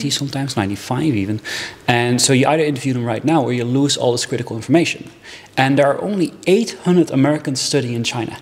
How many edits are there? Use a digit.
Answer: 0